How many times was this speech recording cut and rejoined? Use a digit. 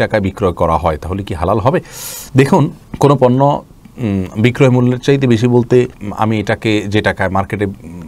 0